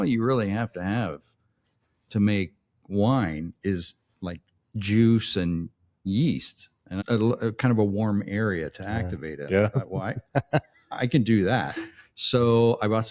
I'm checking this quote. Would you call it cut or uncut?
cut